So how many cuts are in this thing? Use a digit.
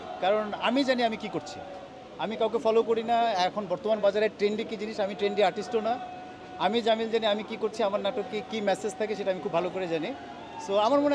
0